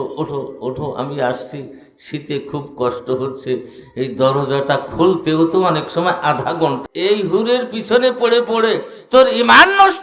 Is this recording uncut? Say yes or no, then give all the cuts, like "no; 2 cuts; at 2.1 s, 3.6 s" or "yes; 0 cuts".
no; 1 cut; at 6.8 s